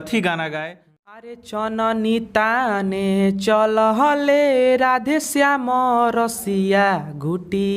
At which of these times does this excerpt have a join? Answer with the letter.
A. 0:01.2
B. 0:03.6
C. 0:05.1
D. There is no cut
A